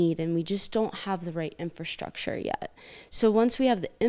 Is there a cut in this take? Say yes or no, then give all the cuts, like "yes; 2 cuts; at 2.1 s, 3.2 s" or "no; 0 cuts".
no; 0 cuts